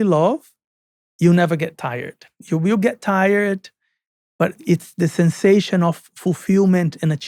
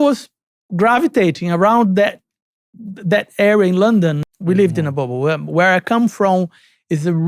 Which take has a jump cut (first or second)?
second